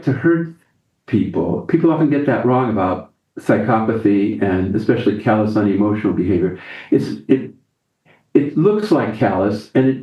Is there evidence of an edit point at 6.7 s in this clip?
no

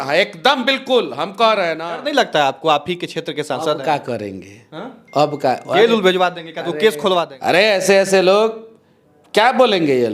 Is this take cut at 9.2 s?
no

